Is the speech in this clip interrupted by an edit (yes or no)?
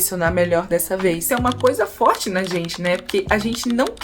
yes